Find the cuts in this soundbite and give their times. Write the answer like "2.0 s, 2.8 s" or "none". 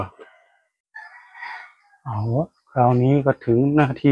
0.9 s